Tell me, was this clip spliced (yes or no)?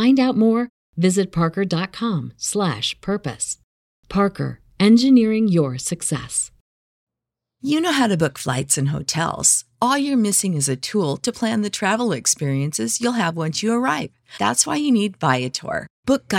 yes